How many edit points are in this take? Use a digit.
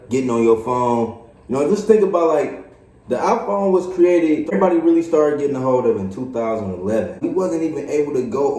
2